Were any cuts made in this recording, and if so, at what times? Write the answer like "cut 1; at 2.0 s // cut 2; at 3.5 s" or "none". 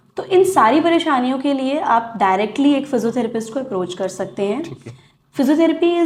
none